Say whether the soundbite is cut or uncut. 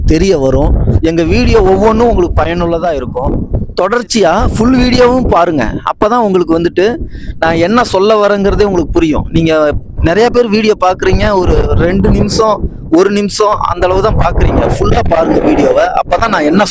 cut